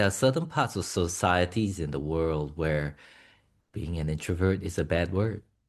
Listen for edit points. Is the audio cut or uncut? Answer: uncut